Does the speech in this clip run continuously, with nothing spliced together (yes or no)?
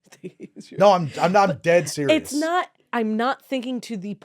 no